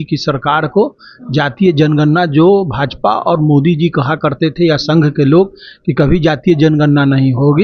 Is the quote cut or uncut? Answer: uncut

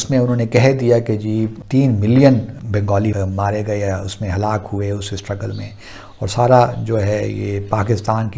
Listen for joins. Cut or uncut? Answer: uncut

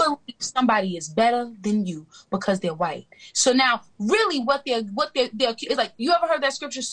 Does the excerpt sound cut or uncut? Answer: uncut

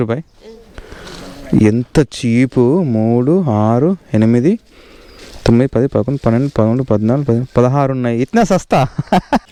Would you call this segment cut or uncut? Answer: uncut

